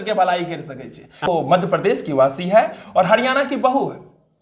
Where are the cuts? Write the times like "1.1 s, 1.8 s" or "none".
1.2 s